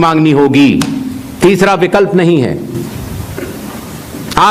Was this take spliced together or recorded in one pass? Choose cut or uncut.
uncut